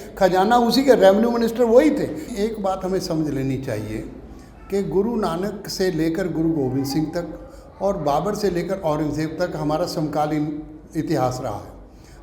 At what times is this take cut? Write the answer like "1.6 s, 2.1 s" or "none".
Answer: 2.2 s